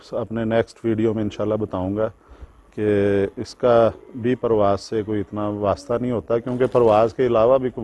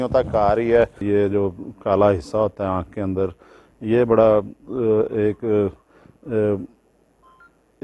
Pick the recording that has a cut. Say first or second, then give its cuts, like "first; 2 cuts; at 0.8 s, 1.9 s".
second; 1 cut; at 1.0 s